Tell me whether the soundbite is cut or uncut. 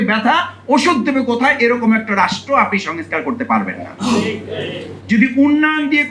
cut